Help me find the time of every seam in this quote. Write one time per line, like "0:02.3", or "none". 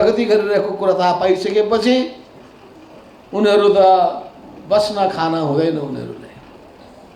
none